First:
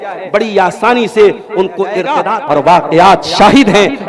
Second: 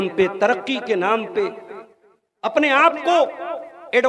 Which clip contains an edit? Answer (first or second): first